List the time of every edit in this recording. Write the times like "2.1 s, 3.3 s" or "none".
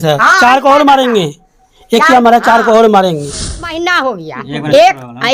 3.7 s